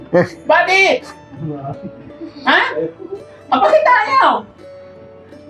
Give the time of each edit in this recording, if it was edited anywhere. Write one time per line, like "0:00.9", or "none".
none